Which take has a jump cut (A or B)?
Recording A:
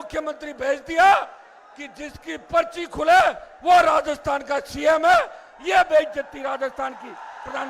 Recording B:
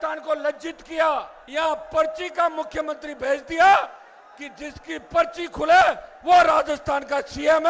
B